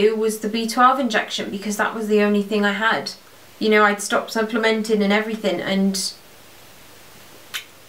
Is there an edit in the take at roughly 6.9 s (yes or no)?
no